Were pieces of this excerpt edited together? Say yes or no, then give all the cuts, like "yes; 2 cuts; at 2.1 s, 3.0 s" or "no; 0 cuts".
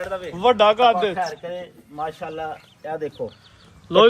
yes; 1 cut; at 1.1 s